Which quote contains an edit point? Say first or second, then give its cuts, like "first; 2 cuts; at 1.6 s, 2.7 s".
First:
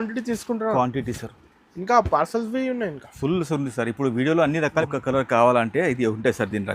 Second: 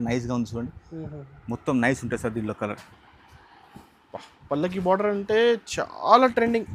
first; 1 cut; at 4.9 s